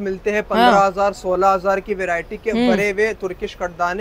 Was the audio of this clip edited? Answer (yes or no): no